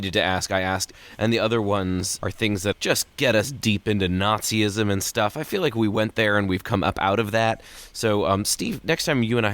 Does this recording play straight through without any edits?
no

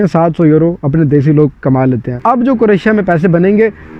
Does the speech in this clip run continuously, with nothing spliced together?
no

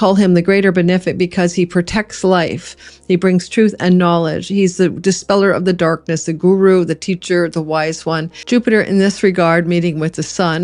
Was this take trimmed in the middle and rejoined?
yes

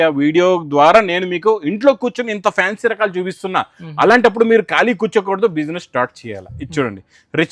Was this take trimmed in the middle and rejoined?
no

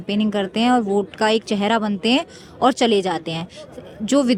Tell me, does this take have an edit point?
no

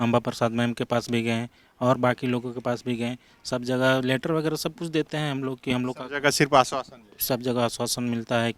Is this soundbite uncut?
yes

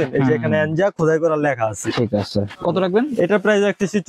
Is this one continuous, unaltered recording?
no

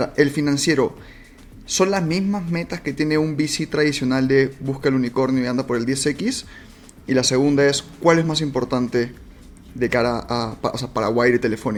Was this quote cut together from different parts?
no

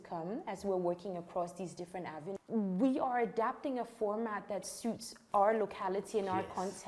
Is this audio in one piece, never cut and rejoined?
no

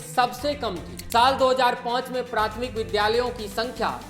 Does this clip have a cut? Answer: yes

